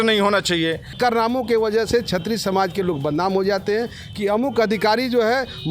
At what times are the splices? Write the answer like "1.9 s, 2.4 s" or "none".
0.9 s